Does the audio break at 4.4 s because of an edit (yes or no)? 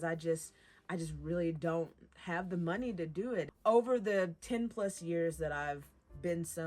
yes